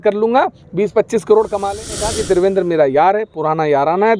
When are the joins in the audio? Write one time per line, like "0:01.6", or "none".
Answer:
0:01.9